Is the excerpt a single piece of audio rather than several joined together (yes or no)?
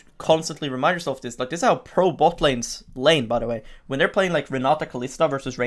yes